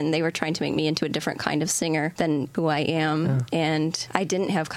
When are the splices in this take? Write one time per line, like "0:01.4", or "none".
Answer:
0:02.4
0:03.5

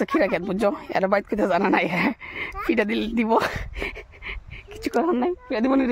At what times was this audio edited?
none

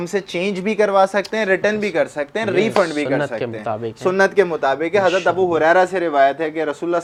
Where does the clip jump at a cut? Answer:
none

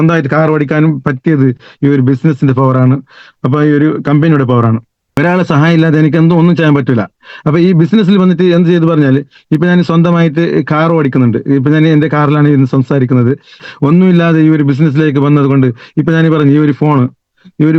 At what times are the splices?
0:05.2
0:13.5

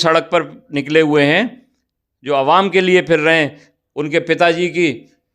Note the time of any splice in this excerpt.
none

